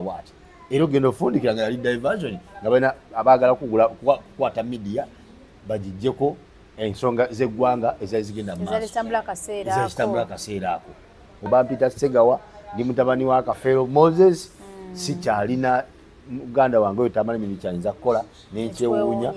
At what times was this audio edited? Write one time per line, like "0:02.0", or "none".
0:11.5

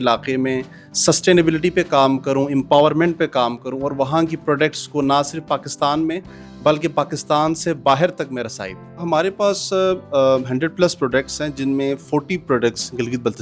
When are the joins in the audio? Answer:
0:09.0

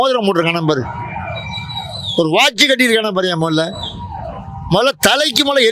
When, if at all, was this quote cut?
none

